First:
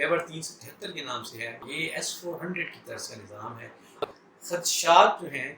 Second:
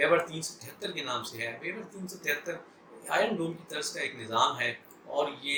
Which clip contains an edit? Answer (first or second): first